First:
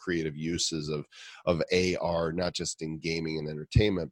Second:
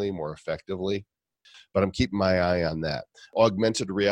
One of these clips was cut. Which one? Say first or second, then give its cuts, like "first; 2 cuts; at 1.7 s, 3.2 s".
second; 2 cuts; at 1.6 s, 3.3 s